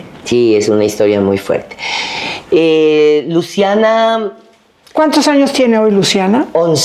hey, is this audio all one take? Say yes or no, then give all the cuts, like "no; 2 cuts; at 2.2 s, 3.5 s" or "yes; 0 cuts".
yes; 0 cuts